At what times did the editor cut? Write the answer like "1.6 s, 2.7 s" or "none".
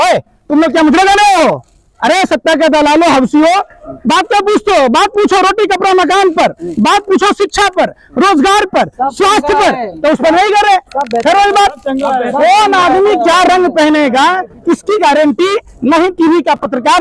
none